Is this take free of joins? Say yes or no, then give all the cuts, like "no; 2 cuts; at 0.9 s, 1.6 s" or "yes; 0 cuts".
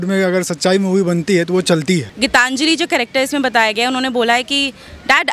no; 1 cut; at 2.1 s